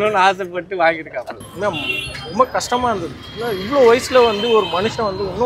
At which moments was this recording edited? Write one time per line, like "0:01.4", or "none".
0:01.4

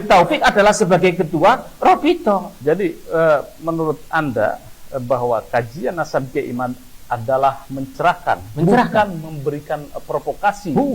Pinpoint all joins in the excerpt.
0:02.5

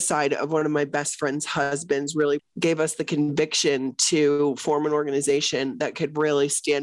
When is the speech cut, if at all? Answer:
0:02.5

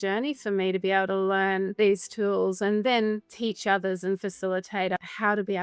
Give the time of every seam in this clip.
0:01.7
0:03.3
0:05.0

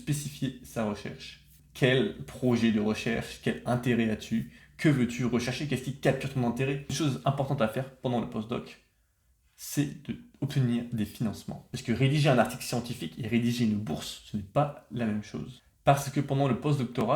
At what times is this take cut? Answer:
0:01.5
0:06.9
0:11.6
0:15.6

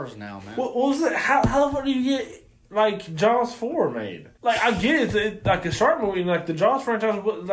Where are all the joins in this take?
none

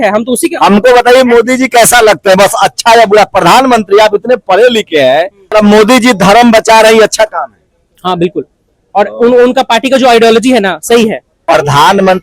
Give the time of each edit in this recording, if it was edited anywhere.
0:05.5
0:11.3

